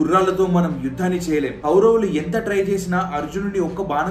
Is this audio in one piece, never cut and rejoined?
no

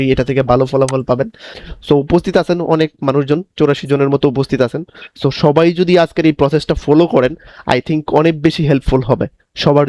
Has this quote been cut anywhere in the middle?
yes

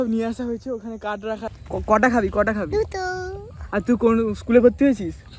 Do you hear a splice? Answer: yes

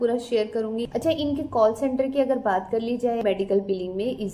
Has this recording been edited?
yes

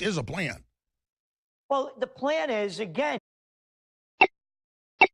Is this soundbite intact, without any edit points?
yes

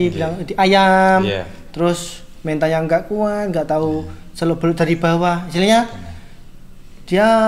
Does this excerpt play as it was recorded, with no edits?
yes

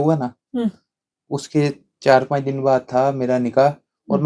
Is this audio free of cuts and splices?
yes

